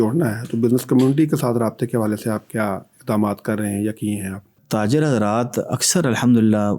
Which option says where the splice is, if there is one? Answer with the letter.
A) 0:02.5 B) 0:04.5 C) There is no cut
B